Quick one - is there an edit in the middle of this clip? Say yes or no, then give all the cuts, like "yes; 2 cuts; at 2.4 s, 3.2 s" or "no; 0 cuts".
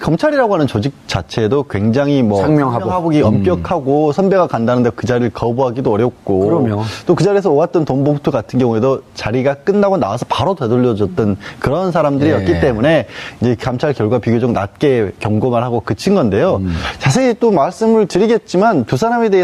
no; 0 cuts